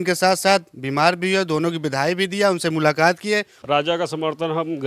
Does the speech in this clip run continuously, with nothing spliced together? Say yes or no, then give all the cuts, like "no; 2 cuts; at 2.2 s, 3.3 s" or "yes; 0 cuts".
no; 1 cut; at 3.5 s